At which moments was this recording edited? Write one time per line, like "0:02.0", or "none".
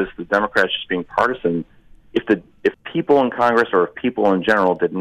0:02.8